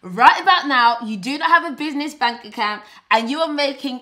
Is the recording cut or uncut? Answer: uncut